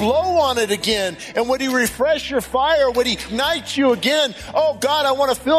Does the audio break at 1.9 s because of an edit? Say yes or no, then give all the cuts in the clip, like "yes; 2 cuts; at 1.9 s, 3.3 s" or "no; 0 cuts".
no; 1 cut; at 3.2 s